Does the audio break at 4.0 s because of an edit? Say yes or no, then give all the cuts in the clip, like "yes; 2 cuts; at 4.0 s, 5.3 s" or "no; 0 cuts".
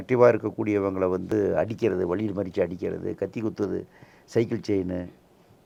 no; 0 cuts